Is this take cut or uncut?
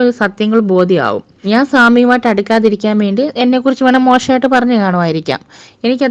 cut